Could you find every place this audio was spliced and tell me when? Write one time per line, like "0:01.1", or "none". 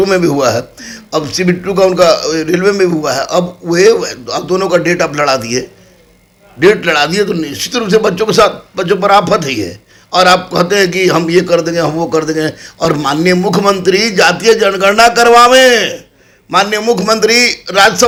none